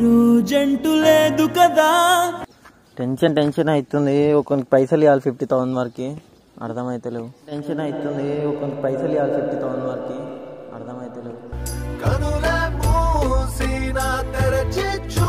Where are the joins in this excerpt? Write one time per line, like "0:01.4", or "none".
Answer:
0:02.4